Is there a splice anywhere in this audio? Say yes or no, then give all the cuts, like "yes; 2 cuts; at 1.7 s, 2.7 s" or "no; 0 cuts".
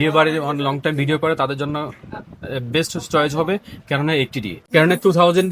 yes; 1 cut; at 4.6 s